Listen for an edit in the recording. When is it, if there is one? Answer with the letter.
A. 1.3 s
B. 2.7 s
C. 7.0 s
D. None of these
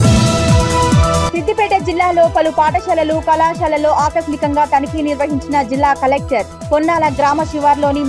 A